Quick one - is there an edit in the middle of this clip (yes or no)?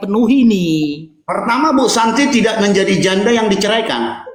no